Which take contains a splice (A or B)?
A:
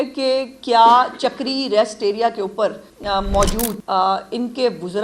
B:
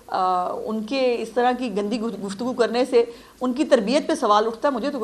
A